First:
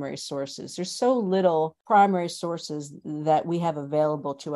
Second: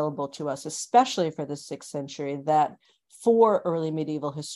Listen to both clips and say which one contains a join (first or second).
first